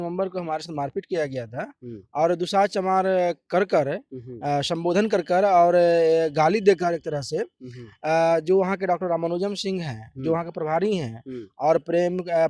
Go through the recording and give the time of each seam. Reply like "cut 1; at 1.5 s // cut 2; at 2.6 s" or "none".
none